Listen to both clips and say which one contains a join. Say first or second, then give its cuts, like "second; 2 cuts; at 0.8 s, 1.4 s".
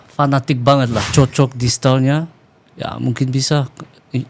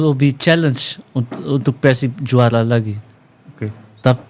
first; 1 cut; at 1.1 s